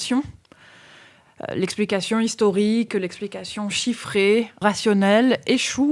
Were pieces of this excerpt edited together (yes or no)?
yes